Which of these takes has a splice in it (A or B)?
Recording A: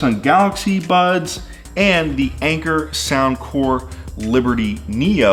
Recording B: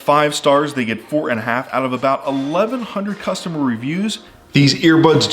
B